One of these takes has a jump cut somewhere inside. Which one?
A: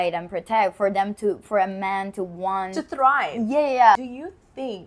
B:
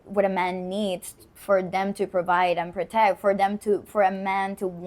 A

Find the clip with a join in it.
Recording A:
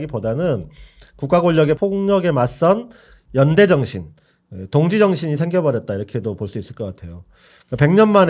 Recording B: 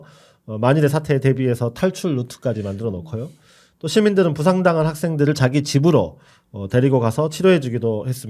A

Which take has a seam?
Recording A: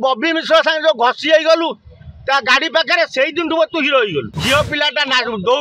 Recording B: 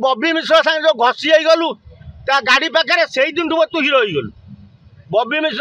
A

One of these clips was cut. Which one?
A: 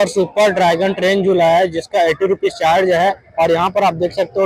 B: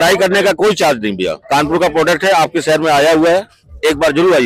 A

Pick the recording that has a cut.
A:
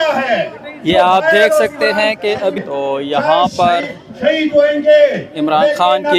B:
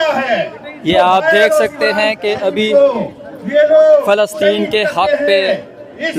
A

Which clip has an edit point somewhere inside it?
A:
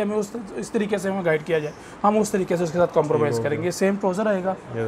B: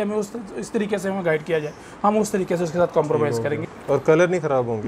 B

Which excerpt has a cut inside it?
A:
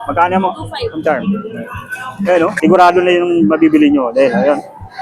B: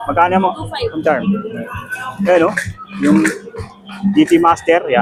A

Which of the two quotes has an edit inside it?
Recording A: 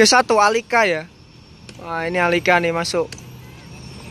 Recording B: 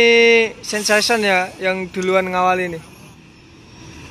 B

